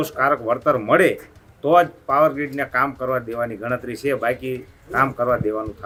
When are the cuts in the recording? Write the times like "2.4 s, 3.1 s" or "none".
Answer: none